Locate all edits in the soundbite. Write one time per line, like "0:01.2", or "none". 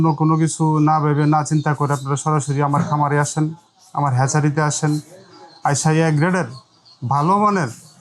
none